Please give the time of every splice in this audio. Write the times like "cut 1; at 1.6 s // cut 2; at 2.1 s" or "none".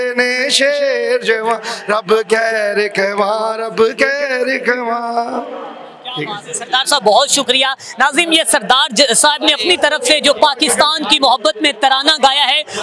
none